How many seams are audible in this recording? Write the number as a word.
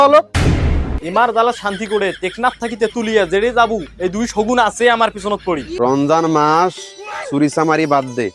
two